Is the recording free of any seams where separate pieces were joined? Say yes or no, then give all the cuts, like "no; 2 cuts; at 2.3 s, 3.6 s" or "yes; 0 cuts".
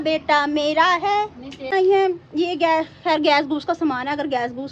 no; 1 cut; at 1.7 s